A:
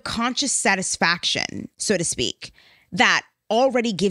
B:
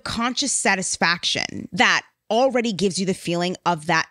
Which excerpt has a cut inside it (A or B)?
B